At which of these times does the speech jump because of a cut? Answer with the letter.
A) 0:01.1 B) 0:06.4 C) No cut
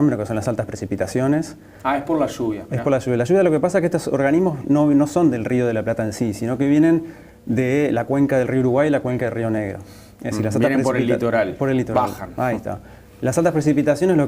B